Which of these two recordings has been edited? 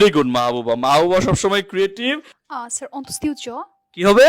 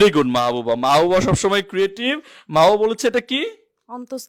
first; 1 cut; at 2.3 s

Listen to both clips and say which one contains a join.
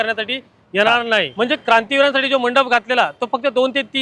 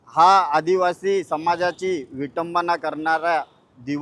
first; 1 cut; at 1.3 s

